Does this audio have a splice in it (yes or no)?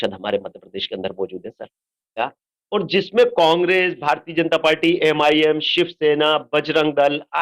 yes